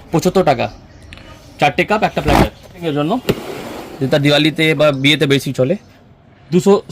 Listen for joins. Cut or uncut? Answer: cut